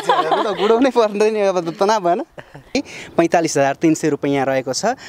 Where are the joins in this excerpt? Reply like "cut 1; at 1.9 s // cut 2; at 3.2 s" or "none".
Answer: cut 1; at 2.8 s

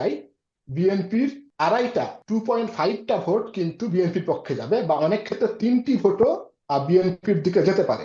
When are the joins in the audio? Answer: cut 1; at 1.4 s // cut 2; at 2.2 s // cut 3; at 6.5 s

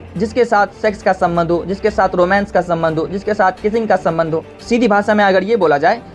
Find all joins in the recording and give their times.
cut 1; at 4.5 s

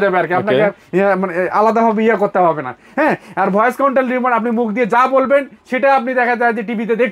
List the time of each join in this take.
none

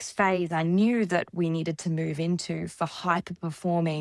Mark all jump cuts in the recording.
none

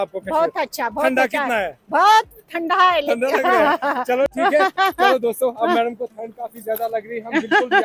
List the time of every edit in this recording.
none

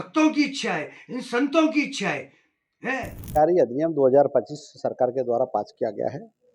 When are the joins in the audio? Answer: cut 1; at 3.2 s

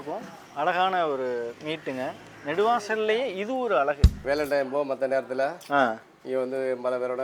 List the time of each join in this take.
cut 1; at 4.2 s

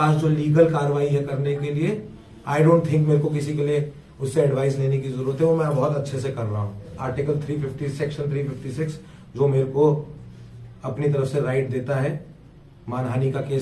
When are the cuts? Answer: cut 1; at 6.9 s

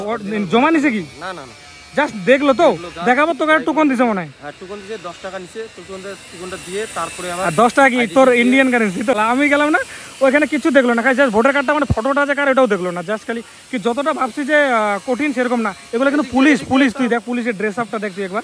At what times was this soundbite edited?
none

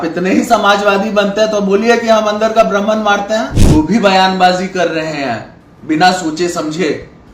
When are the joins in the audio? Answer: cut 1; at 3.6 s

